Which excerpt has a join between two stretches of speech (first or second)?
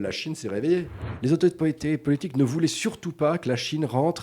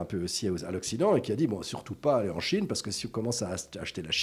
first